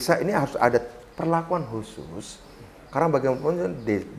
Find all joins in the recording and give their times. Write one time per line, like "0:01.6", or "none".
none